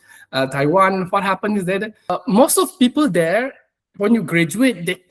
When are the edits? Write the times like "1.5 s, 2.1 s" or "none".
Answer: 2.1 s